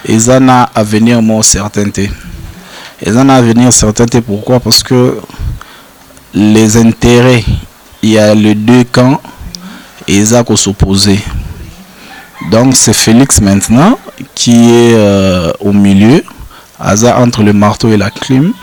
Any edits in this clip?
no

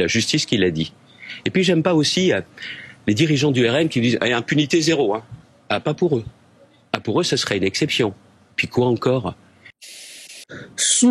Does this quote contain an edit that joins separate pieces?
yes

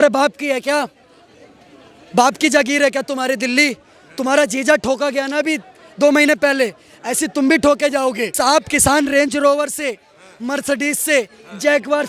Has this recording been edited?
yes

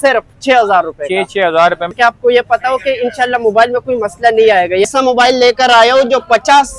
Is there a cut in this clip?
yes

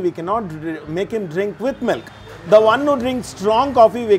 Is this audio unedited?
yes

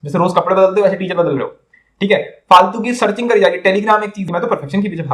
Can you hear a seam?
yes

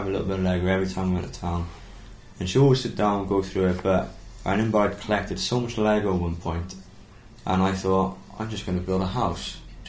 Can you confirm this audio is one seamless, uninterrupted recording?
yes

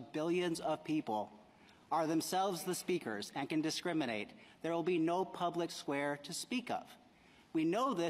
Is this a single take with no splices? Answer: no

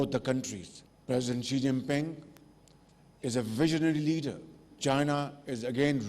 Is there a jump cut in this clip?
yes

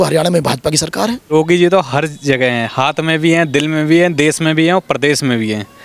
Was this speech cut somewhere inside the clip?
yes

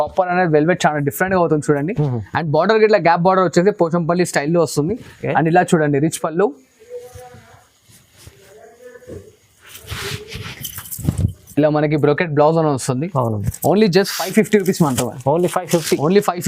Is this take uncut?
yes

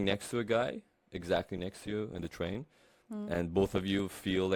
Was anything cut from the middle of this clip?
no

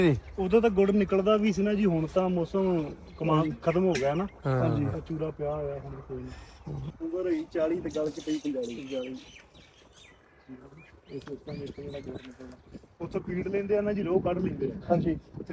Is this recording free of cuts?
no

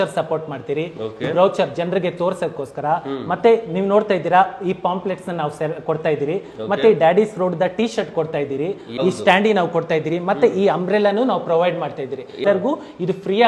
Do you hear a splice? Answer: yes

